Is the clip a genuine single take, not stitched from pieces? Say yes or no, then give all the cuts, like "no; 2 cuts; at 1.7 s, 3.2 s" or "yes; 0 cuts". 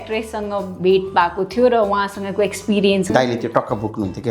no; 1 cut; at 3.1 s